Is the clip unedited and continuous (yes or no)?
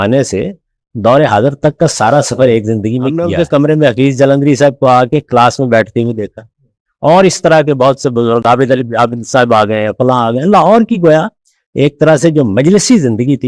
no